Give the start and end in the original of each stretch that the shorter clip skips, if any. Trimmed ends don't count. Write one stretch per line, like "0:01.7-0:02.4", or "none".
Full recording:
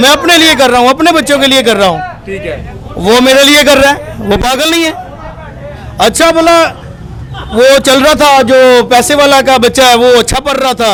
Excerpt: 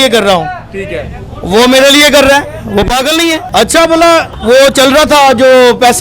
0:05.0-0:05.9
0:06.8-0:07.4